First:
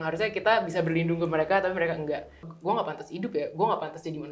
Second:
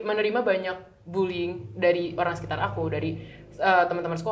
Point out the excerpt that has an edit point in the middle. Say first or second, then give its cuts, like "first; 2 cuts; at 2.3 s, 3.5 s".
first; 1 cut; at 2.5 s